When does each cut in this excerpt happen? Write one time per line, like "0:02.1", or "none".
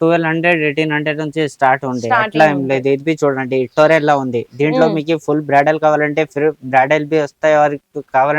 none